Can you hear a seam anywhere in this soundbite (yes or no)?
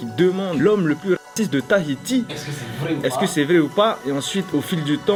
no